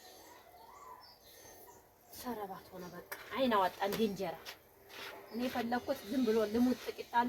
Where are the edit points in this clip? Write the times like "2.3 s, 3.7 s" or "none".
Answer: none